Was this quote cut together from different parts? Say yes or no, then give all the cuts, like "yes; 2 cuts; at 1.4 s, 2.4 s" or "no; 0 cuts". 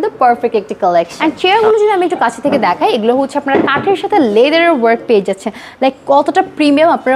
yes; 1 cut; at 1.1 s